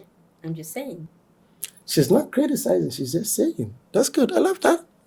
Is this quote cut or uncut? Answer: uncut